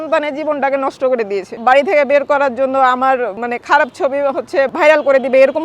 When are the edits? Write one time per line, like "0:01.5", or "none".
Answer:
0:01.5
0:03.4
0:04.7